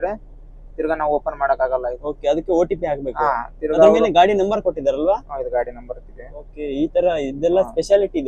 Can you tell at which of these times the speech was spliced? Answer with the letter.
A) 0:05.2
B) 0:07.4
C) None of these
C